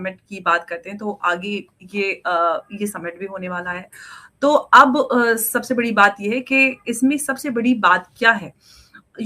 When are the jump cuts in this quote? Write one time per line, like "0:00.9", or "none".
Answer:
none